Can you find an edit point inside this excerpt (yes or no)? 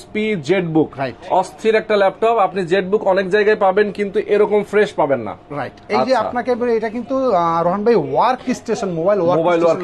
no